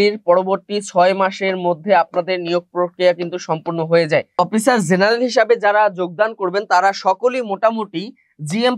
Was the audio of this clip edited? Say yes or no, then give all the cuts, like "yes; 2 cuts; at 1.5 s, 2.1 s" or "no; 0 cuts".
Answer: yes; 1 cut; at 4.4 s